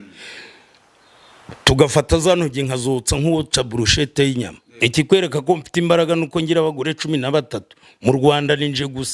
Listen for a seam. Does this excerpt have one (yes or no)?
yes